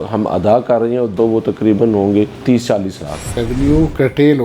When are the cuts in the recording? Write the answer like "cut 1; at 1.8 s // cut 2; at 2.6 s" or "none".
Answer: cut 1; at 1.1 s // cut 2; at 3.4 s